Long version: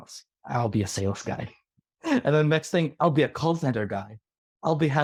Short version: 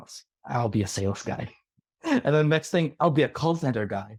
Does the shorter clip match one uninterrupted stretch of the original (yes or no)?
yes